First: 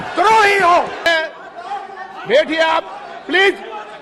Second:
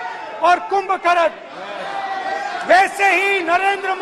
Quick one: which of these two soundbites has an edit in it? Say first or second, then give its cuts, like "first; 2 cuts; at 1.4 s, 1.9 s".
first; 1 cut; at 1.1 s